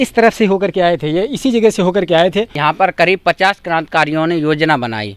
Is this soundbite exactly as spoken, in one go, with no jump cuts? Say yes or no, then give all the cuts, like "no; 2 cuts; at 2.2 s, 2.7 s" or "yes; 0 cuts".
no; 1 cut; at 2.6 s